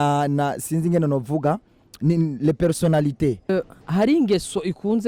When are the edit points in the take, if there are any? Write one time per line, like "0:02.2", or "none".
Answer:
0:03.5